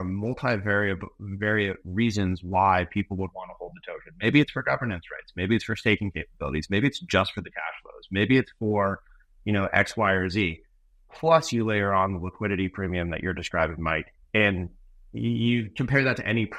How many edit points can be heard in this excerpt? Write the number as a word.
zero